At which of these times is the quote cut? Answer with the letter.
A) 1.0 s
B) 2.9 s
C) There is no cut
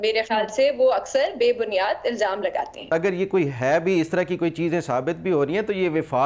B